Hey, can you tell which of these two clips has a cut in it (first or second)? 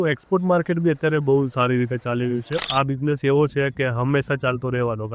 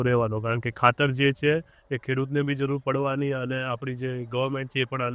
first